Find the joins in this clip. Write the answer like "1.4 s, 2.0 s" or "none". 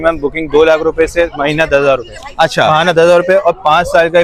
none